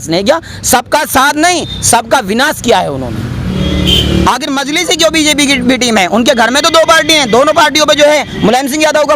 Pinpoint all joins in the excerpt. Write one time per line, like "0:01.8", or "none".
0:03.5